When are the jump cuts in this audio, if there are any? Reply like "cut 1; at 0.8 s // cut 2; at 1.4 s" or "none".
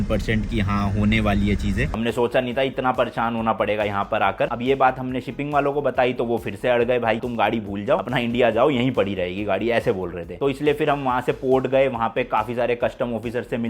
cut 1; at 1.9 s // cut 2; at 4.5 s // cut 3; at 7.2 s // cut 4; at 10.4 s